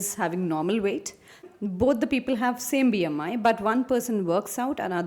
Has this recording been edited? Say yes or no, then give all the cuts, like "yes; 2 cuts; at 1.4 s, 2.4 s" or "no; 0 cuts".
yes; 1 cut; at 1.5 s